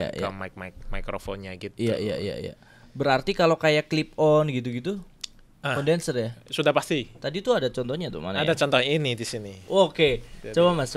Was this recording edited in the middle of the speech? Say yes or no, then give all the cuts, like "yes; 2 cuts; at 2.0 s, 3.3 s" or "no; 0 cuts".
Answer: no; 0 cuts